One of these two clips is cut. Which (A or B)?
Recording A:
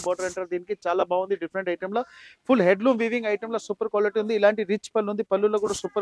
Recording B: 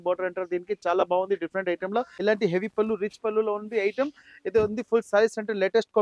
B